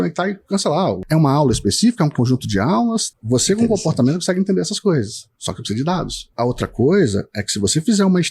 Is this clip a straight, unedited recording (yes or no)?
no